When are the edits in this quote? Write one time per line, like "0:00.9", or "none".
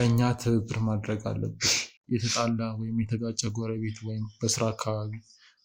0:01.9